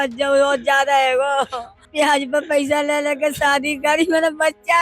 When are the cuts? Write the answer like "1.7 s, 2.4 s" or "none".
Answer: 1.9 s